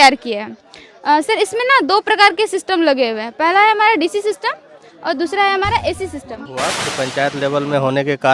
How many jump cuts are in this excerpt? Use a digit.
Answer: 1